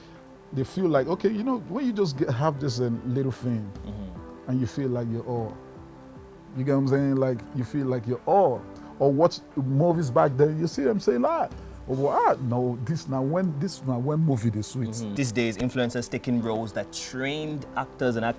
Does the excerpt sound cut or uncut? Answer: cut